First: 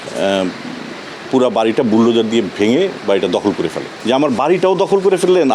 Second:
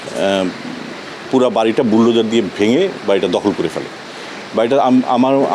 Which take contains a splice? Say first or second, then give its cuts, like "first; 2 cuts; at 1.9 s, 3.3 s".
first; 1 cut; at 3.9 s